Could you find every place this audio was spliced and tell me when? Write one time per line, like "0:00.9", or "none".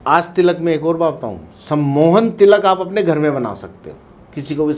none